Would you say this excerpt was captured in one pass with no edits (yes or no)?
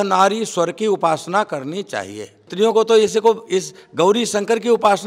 no